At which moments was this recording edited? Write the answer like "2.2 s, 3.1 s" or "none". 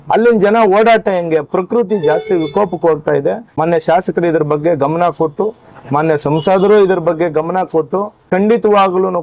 3.5 s, 8.3 s

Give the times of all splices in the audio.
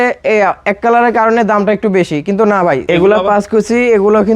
2.8 s

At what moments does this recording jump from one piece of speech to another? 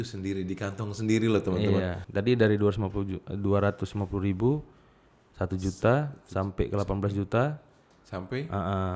2.0 s

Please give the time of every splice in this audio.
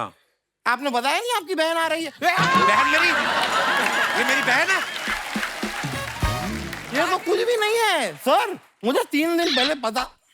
6.7 s

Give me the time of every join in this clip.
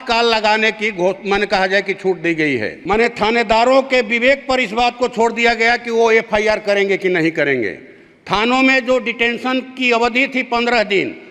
2.7 s

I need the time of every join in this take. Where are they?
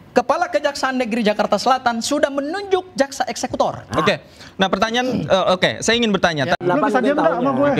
6.6 s

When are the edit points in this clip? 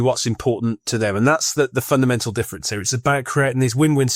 none

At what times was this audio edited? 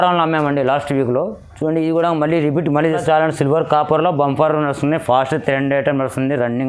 3.0 s

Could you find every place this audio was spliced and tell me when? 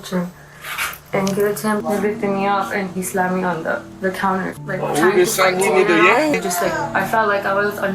1.8 s, 4.6 s, 6.3 s

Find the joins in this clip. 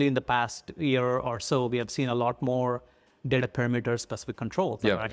none

